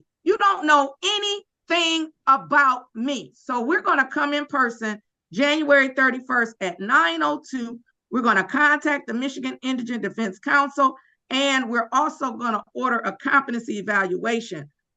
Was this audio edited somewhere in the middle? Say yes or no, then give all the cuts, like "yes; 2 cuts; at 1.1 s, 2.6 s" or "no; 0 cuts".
no; 0 cuts